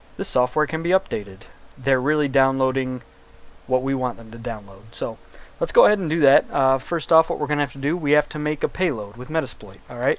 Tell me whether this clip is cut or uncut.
cut